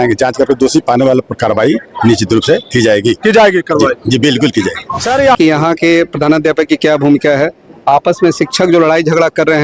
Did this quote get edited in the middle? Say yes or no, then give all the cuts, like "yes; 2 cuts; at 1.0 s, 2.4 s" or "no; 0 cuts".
yes; 1 cut; at 5.4 s